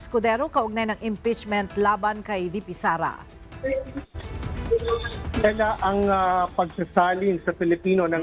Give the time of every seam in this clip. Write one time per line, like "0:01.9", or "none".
none